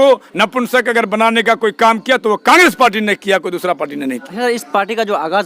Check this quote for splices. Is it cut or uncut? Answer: cut